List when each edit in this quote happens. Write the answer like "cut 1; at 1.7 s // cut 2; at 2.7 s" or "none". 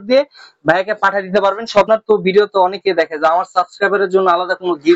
cut 1; at 1.9 s

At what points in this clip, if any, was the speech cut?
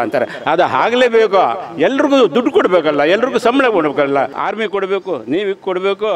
cut 1; at 4.4 s

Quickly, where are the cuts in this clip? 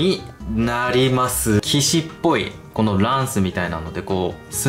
cut 1; at 1.6 s

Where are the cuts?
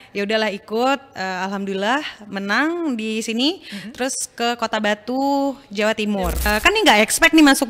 cut 1; at 6.4 s

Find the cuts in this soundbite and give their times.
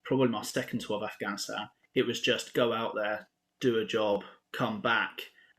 cut 1; at 4.4 s

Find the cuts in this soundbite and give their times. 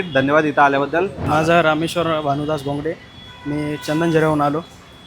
cut 1; at 1.2 s

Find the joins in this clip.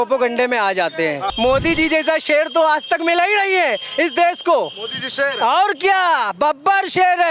cut 1; at 1.3 s

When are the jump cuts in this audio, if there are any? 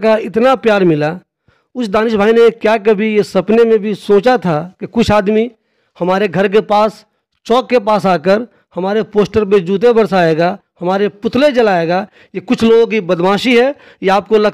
none

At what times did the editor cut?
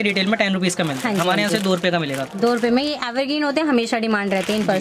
none

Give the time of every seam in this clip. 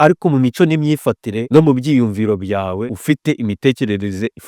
cut 1; at 1.3 s // cut 2; at 2.9 s

